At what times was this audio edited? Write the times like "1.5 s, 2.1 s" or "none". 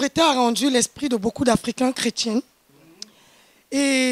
none